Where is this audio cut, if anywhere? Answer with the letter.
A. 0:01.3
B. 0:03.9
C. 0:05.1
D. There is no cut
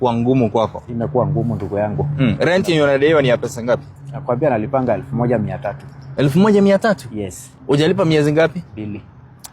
D